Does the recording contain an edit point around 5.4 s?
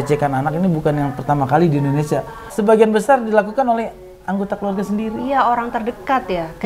no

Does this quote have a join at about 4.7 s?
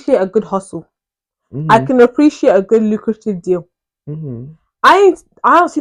no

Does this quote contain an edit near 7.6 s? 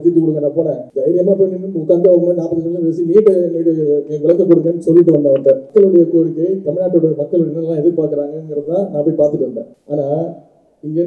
no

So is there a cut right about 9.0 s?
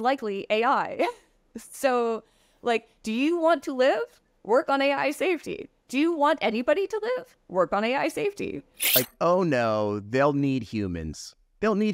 yes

